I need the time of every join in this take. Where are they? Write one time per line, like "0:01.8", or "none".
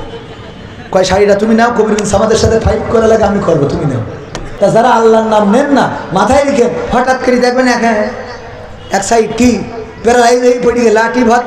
0:04.5